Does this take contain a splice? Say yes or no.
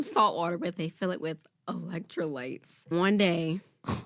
yes